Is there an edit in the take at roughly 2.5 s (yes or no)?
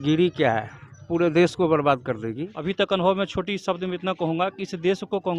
yes